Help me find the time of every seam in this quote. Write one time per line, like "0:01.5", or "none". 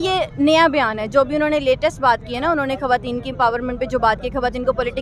none